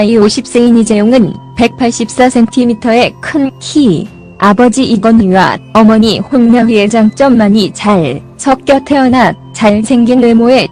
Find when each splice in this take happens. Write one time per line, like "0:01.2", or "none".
0:01.4